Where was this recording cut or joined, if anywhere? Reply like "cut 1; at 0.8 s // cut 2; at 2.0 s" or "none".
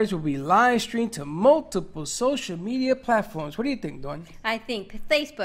none